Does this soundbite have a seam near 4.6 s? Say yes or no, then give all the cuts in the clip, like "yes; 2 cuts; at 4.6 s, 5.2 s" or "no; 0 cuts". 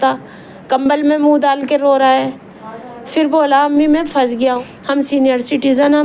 yes; 1 cut; at 4.6 s